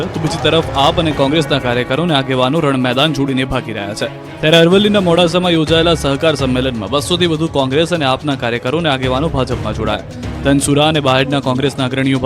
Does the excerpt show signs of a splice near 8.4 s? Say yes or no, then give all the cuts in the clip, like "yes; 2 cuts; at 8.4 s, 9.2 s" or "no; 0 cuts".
yes; 1 cut; at 8.4 s